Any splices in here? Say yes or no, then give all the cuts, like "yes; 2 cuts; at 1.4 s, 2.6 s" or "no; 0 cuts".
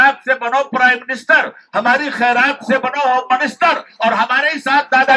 no; 0 cuts